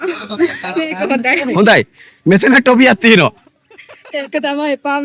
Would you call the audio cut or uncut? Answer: uncut